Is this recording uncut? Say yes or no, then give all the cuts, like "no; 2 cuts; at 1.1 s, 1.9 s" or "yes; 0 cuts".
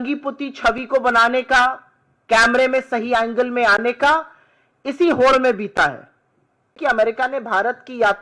no; 1 cut; at 6.8 s